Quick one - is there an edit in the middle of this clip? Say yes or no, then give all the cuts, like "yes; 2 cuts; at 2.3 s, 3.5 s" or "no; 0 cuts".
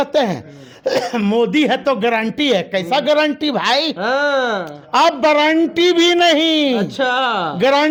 no; 0 cuts